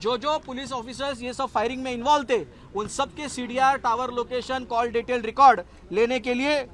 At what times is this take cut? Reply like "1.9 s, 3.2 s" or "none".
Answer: none